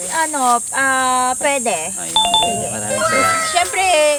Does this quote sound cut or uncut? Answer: uncut